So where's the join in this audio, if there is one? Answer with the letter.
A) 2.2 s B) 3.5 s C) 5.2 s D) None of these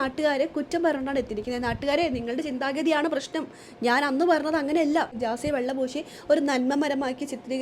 C